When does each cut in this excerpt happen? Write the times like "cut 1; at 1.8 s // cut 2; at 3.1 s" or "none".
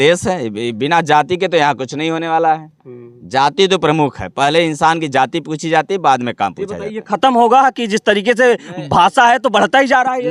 none